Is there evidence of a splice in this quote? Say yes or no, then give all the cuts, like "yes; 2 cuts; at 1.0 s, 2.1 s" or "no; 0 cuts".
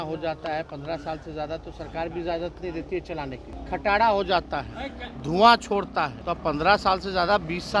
yes; 2 cuts; at 3.5 s, 6.2 s